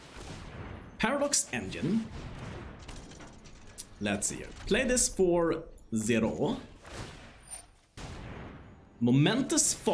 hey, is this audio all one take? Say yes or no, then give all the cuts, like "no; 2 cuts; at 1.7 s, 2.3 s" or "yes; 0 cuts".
no; 1 cut; at 7.8 s